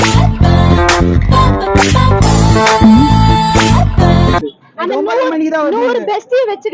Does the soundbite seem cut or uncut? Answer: uncut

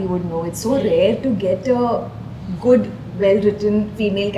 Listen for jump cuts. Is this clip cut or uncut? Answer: uncut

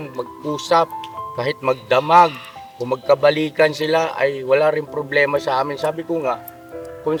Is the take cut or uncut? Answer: uncut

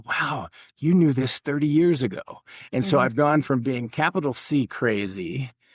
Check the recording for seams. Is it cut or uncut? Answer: uncut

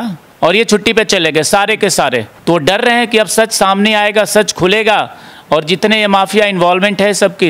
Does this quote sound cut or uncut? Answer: cut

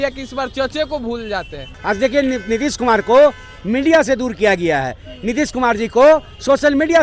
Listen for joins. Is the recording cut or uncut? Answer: cut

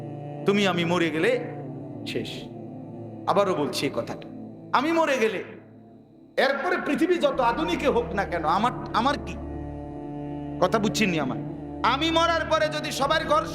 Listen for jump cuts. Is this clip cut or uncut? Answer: cut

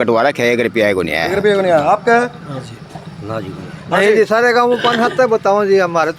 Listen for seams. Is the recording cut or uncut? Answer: uncut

